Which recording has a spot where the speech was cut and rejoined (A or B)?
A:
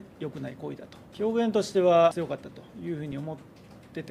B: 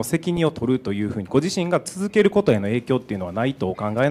A